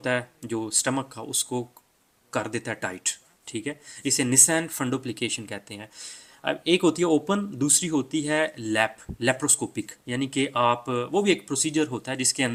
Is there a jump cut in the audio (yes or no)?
no